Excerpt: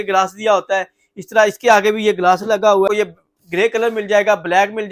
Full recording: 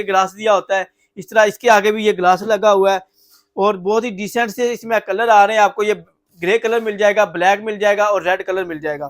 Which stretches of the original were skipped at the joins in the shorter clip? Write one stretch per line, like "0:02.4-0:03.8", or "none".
0:02.9-0:05.8